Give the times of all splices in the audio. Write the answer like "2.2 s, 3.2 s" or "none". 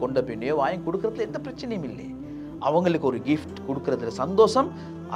none